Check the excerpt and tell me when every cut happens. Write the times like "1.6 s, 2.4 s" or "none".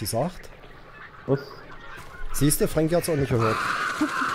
none